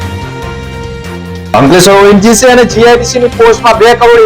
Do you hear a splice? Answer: yes; 1 cut; at 1.5 s

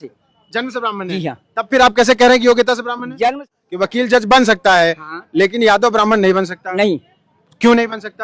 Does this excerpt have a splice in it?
yes; 1 cut; at 3.5 s

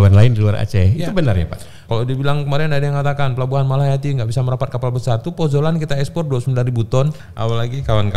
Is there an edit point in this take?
yes; 2 cuts; at 1.9 s, 7.3 s

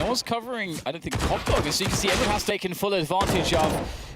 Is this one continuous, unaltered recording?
no; 1 cut; at 2.5 s

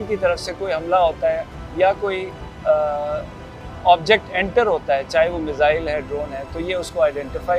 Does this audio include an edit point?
no; 0 cuts

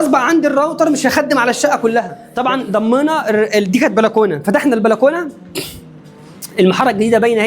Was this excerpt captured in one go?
no; 1 cut; at 2.2 s

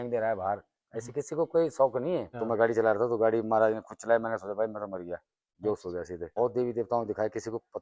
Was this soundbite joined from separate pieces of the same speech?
yes; 2 cuts; at 2.3 s, 6.3 s

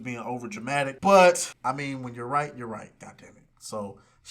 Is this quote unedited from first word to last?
no; 2 cuts; at 1.0 s, 1.5 s

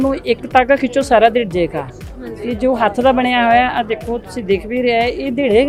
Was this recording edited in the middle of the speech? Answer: no; 0 cuts

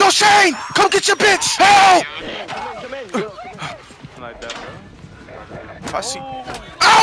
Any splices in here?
yes; 2 cuts; at 1.5 s, 4.2 s

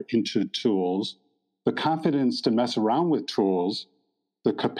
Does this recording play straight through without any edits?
yes; 0 cuts

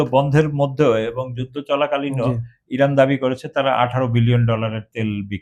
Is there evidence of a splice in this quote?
no; 0 cuts

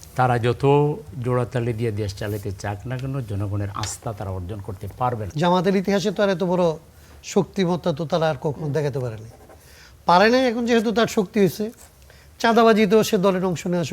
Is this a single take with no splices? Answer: no; 1 cut; at 5.3 s

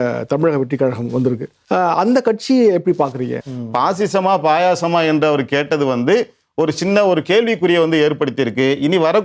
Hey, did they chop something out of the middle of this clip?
yes; 2 cuts; at 1.5 s, 3.4 s

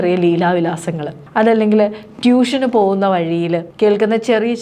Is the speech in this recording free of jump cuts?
yes; 0 cuts

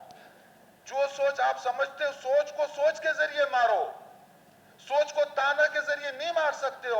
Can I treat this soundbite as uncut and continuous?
yes; 0 cuts

